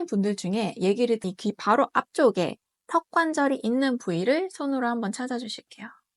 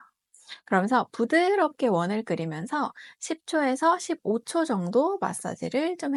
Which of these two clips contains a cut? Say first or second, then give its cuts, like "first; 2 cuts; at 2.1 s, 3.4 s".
first; 1 cut; at 1.2 s